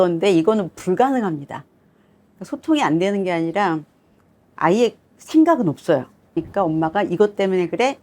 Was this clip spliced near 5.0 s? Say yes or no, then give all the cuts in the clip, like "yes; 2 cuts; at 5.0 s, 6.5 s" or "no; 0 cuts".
no; 1 cut; at 6.4 s